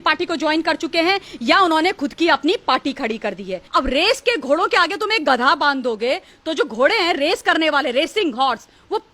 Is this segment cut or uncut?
cut